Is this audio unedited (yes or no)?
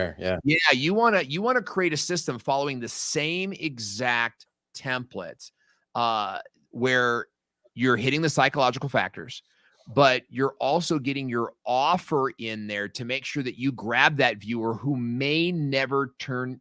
yes